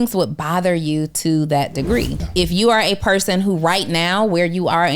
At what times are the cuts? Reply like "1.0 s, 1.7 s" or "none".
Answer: 2.2 s